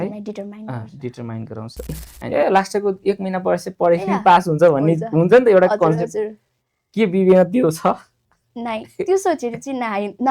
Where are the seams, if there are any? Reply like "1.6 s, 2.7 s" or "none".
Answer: 2.1 s